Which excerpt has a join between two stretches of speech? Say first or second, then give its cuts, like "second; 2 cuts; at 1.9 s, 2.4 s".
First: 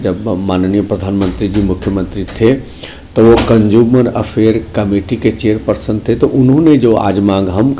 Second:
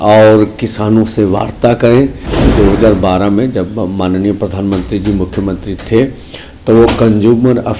second; 1 cut; at 2.5 s